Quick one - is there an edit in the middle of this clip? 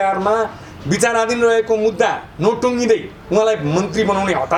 no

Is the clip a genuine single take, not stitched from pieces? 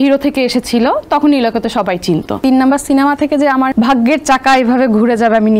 no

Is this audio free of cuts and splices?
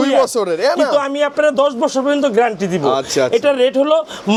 yes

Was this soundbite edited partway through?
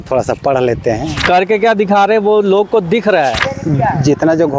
yes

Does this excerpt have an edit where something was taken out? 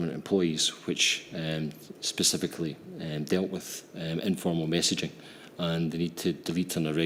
no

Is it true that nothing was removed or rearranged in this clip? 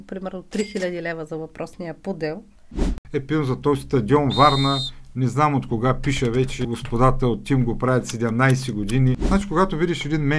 no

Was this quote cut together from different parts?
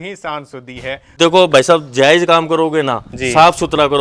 yes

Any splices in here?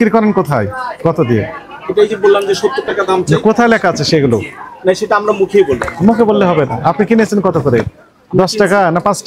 no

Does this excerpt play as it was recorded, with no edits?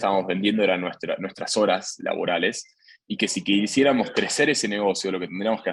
yes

